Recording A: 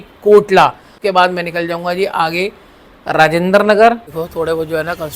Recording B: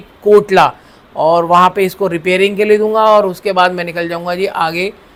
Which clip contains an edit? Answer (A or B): A